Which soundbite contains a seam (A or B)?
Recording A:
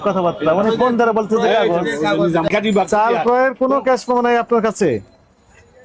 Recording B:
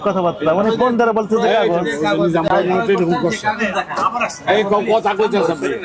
A